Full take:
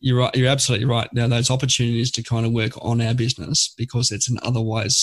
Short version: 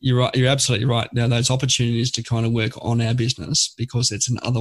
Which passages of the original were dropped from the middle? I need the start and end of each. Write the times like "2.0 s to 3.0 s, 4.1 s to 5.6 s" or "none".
none